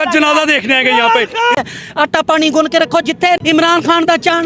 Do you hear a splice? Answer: yes; 2 cuts; at 1.6 s, 3.4 s

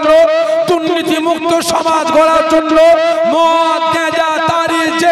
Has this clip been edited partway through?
no; 0 cuts

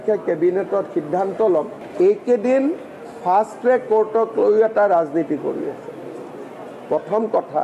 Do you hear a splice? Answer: yes; 1 cut; at 1.4 s

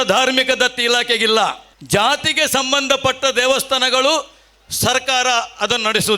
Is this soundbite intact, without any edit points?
no; 1 cut; at 1.7 s

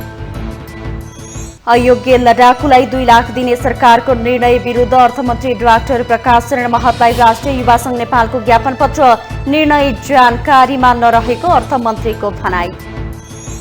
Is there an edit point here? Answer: yes; 1 cut; at 1.0 s

